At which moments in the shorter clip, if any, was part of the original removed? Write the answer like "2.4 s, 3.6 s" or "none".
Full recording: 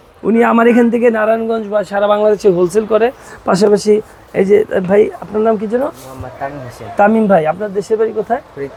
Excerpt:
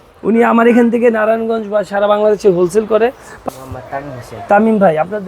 3.4 s